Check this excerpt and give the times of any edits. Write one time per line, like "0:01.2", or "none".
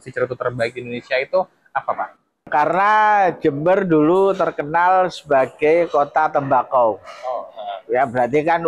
none